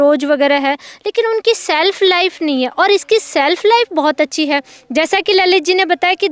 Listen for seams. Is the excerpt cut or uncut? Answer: uncut